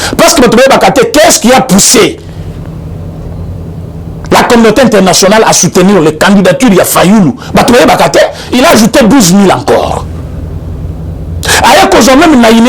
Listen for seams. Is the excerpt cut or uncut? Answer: cut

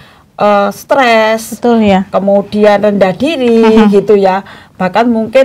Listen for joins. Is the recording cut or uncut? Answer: uncut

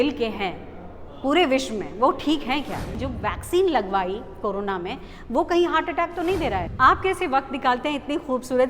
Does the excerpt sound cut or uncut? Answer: cut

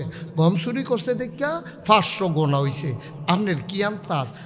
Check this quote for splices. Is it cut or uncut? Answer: uncut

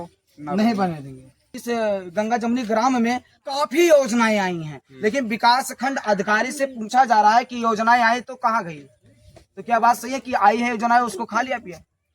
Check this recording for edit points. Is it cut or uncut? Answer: cut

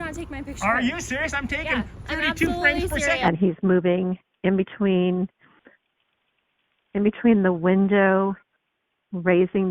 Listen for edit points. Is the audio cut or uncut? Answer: cut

